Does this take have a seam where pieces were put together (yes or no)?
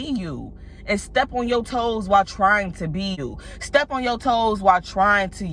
yes